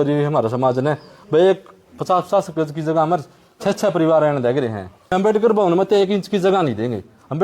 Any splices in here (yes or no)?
yes